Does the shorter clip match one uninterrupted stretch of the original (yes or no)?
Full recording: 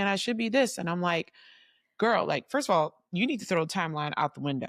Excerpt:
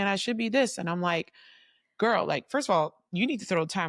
yes